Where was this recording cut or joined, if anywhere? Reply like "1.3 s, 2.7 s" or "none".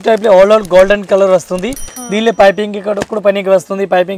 none